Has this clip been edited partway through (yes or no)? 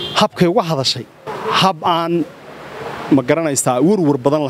yes